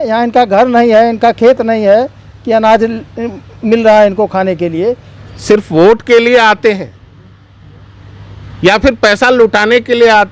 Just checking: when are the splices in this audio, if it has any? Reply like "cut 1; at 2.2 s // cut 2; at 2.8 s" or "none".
cut 1; at 5.1 s